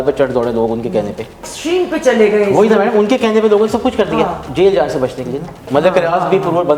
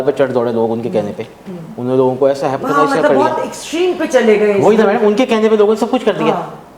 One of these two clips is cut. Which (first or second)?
first